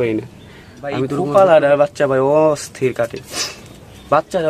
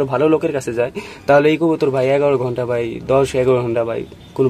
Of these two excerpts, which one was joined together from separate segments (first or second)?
first